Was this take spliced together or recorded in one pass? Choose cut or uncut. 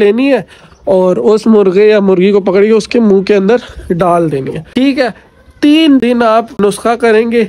cut